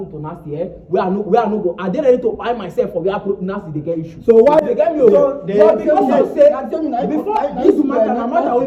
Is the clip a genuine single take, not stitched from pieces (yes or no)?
yes